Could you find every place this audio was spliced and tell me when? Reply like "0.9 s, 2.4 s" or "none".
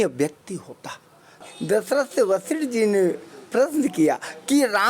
1.4 s